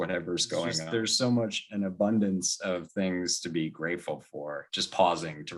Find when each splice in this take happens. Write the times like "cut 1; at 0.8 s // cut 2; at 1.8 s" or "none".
cut 1; at 0.8 s // cut 2; at 4.7 s